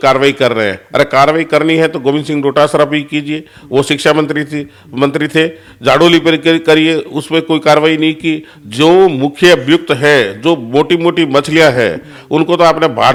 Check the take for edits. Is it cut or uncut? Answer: uncut